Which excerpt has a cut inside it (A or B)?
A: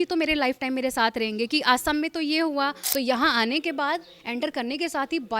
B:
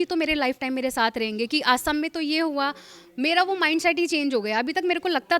A